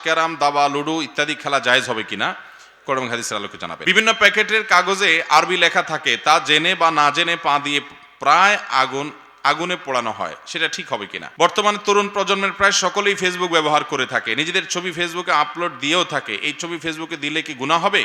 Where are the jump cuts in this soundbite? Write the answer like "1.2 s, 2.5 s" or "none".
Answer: 3.8 s, 11.2 s